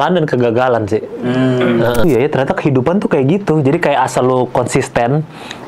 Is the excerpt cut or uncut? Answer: cut